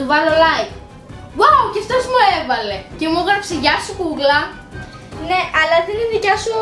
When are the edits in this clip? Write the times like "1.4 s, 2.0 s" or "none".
none